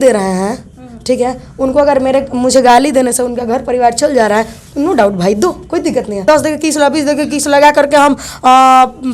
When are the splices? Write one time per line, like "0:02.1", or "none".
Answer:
0:06.2

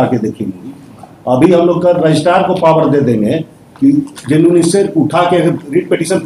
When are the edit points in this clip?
none

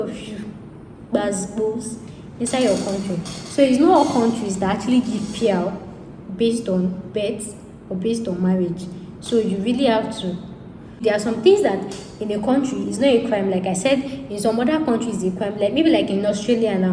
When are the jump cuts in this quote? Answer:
0:11.0

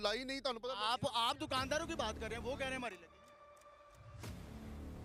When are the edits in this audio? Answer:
none

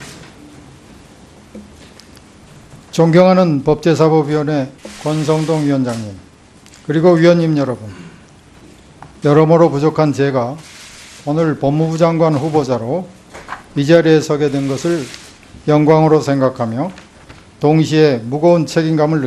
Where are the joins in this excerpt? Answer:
none

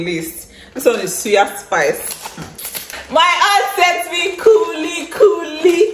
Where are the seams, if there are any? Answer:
0:02.9

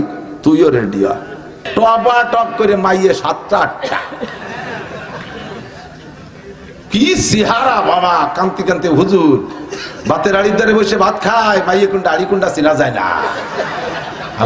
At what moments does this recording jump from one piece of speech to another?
0:01.6

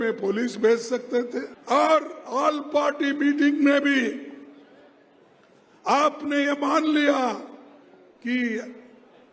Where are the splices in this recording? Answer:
0:01.5

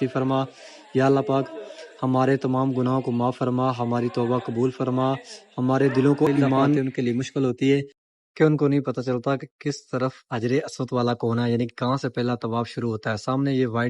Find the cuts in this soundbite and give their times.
0:06.8

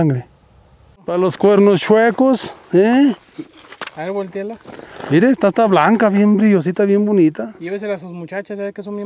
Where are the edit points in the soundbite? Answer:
0:01.2

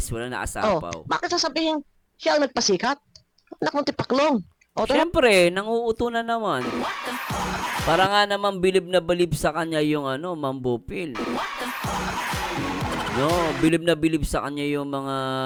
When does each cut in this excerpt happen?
none

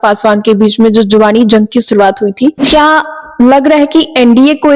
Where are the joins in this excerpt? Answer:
none

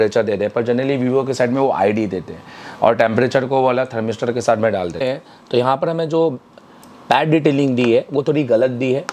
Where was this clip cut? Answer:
0:05.0

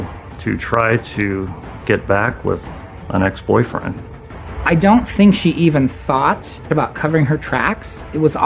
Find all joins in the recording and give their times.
0:04.2
0:06.6

